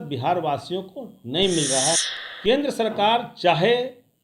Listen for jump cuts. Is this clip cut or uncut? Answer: cut